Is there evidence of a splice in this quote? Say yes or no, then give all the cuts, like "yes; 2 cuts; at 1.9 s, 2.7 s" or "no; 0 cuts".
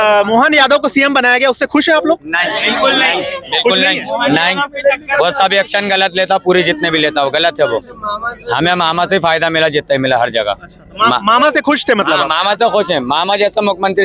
no; 0 cuts